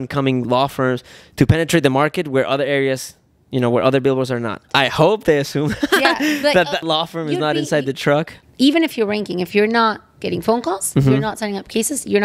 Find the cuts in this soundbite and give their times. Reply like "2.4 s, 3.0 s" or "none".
4.7 s, 6.8 s, 8.4 s